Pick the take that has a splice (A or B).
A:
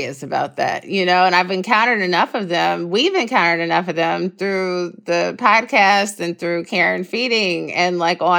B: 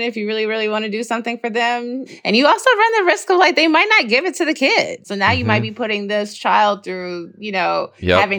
B